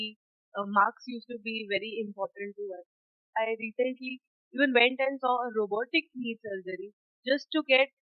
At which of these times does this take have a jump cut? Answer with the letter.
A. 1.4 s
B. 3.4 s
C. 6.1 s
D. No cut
B